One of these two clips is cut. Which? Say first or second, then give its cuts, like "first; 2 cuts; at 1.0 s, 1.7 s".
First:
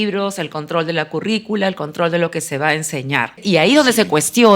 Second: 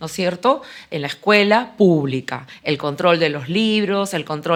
first; 1 cut; at 3.4 s